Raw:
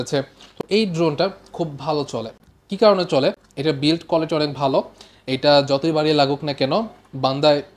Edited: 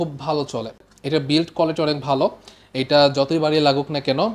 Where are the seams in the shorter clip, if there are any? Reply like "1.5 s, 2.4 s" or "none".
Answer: 0.9 s

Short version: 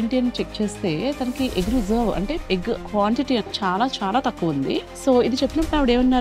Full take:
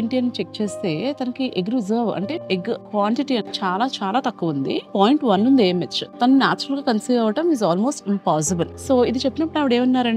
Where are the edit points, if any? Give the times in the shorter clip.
4.9 s

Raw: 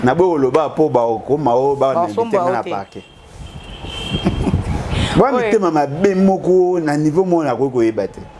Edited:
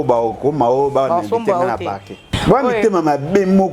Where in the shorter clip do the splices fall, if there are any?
2.3 s

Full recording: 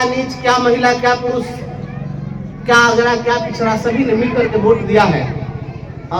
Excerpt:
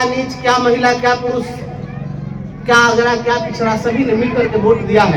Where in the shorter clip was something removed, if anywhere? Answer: none

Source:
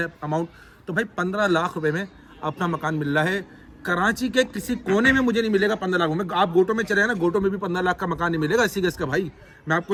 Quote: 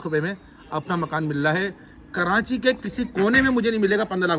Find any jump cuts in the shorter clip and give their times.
none

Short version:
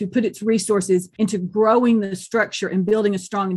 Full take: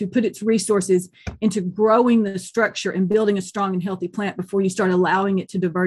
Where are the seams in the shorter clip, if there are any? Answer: 1.1 s

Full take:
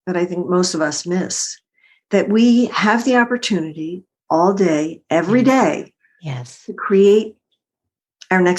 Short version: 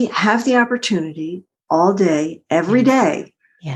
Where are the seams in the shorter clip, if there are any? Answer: none

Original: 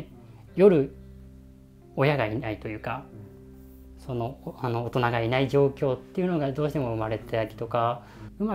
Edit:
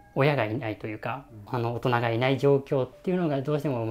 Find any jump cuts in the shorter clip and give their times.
1.4 s

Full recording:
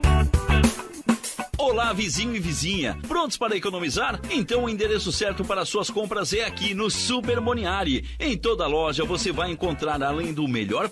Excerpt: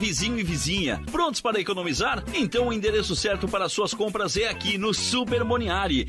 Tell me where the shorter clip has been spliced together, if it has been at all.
none

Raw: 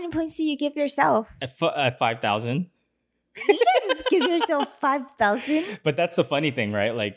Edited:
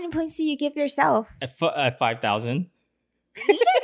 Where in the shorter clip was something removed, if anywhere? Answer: none

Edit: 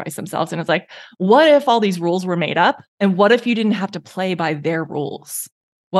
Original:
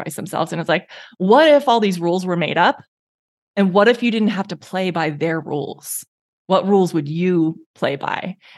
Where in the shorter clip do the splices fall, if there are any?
2.9 s

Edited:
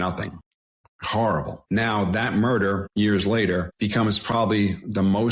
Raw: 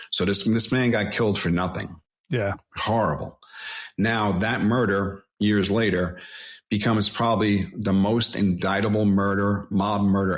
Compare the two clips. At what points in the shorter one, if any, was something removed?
0.8 s, 1.6 s, 2.8 s, 3.7 s

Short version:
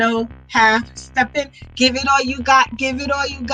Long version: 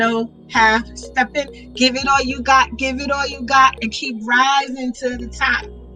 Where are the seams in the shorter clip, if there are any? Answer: none

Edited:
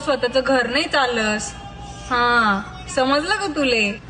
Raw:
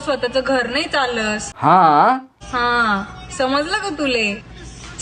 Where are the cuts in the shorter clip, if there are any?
1.7 s

